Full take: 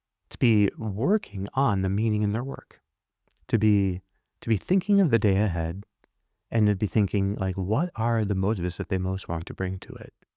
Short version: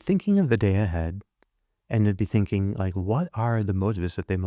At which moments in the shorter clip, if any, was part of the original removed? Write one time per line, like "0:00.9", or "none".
none